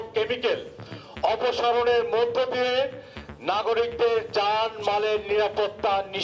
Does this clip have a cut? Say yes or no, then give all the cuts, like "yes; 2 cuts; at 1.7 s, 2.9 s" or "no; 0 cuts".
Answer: no; 0 cuts